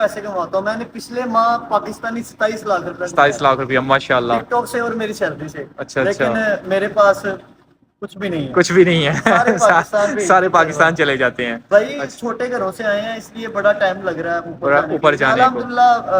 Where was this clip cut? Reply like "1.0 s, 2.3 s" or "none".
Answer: none